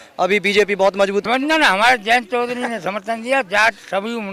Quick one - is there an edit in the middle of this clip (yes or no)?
yes